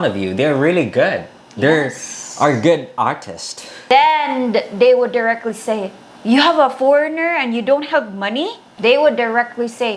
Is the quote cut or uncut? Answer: cut